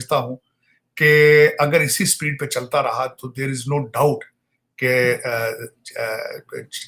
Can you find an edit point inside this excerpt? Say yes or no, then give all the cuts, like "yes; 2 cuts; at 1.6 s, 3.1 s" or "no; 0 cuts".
no; 0 cuts